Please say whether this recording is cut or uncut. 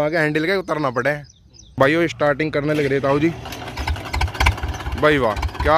cut